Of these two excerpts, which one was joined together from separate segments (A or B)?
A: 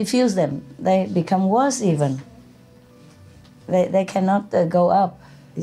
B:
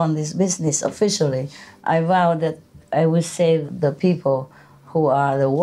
B